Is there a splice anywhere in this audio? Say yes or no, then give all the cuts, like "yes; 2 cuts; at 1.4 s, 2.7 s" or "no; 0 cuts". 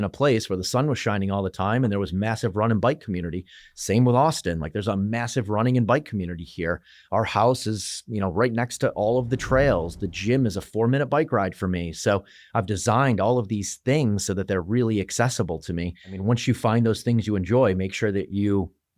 yes; 1 cut; at 16.2 s